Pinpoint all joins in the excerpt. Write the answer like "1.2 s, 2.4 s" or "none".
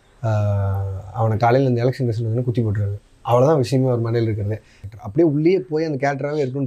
4.8 s